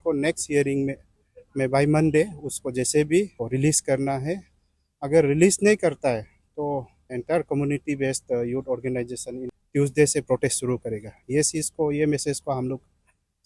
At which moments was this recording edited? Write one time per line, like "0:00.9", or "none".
0:03.5
0:07.2
0:09.5